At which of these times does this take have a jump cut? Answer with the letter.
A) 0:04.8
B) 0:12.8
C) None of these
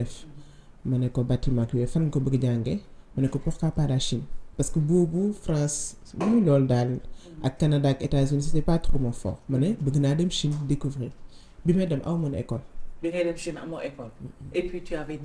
C